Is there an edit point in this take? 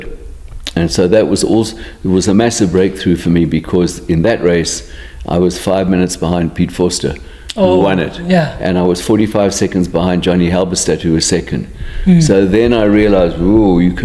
no; 0 cuts

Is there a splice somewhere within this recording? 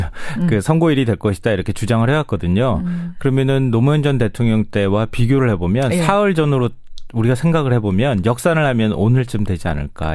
no; 0 cuts

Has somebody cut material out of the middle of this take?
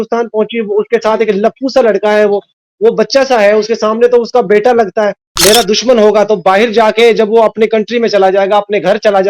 yes; 1 cut; at 5.2 s

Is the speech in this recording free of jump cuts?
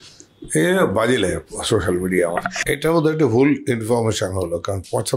no; 1 cut; at 2.6 s

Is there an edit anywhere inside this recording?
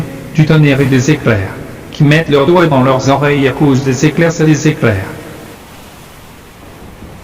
yes; 1 cut; at 5.5 s

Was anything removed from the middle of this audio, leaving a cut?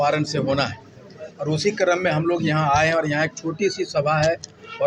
no; 0 cuts

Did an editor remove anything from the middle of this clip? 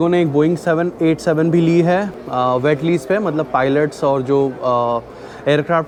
no; 0 cuts

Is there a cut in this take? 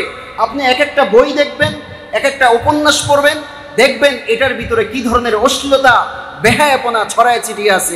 no; 0 cuts

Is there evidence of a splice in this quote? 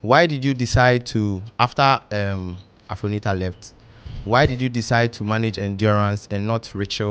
no; 0 cuts

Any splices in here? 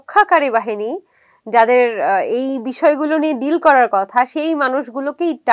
no; 0 cuts

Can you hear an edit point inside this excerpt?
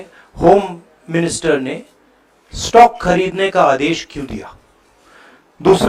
no; 0 cuts

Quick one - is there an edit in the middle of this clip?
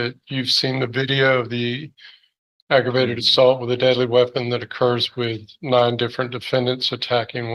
no; 0 cuts

